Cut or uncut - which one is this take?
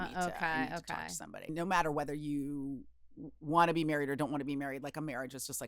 cut